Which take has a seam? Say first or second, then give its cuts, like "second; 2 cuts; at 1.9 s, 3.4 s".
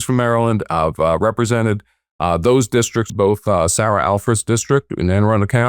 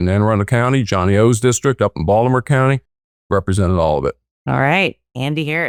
first; 1 cut; at 3.1 s